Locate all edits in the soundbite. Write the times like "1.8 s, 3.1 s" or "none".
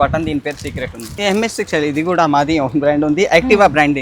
1.1 s